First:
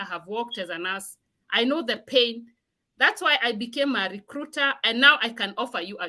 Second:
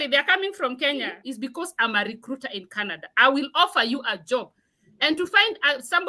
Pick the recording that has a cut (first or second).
second